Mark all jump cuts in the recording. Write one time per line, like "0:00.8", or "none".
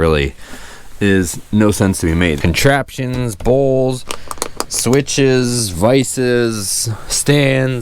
0:02.4